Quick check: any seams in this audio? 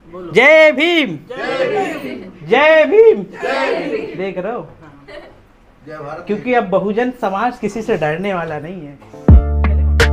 yes; 1 cut; at 9.1 s

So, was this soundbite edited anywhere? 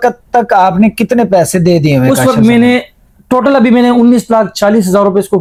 no; 0 cuts

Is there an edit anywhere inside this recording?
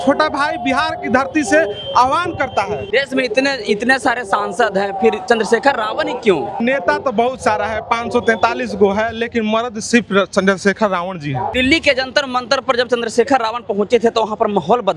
yes; 3 cuts; at 2.8 s, 6.6 s, 11.5 s

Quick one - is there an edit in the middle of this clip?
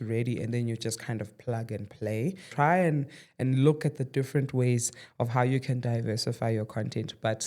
yes; 1 cut; at 2.5 s

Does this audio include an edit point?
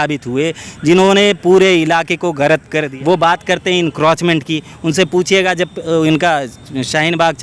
yes; 1 cut; at 2.8 s

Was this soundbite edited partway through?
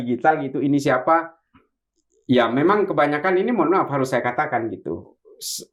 no; 0 cuts

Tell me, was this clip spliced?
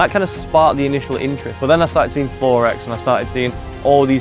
yes; 1 cut; at 1.5 s

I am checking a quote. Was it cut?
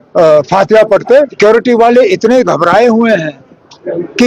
yes; 1 cut; at 1.3 s

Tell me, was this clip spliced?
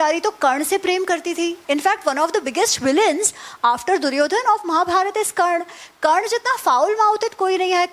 yes; 1 cut; at 1.6 s

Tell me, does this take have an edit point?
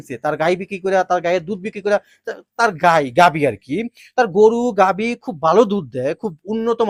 no; 0 cuts

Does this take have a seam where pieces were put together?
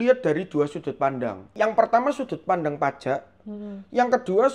yes; 1 cut; at 1.5 s

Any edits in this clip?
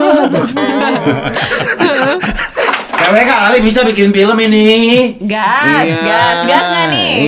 yes; 1 cut; at 2.6 s

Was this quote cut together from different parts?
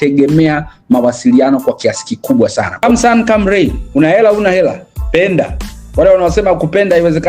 yes; 1 cut; at 2.8 s

